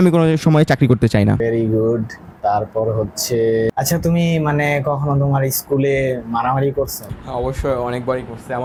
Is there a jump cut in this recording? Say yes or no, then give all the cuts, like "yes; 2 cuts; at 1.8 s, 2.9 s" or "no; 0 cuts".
no; 0 cuts